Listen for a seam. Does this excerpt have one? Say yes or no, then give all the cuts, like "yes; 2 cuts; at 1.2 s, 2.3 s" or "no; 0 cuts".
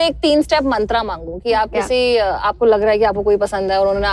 no; 0 cuts